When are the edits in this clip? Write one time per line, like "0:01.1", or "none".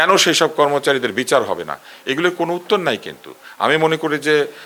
none